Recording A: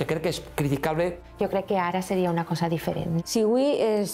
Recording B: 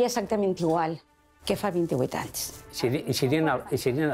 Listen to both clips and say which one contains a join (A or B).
A